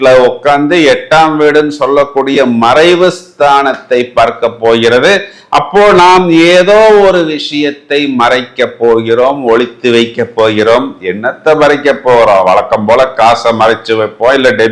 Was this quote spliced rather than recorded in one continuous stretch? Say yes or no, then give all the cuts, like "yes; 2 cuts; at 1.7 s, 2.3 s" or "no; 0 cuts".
no; 0 cuts